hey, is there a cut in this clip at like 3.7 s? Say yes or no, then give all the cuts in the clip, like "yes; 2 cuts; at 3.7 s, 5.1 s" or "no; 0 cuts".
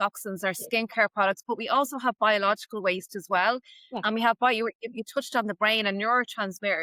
no; 0 cuts